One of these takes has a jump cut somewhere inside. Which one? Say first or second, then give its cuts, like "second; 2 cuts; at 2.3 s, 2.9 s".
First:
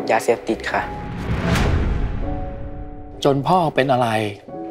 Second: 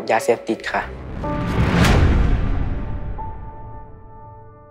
first; 2 cuts; at 1.0 s, 3.0 s